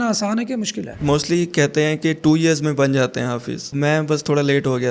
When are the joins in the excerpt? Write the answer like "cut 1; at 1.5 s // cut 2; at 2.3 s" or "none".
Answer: cut 1; at 1.0 s // cut 2; at 3.7 s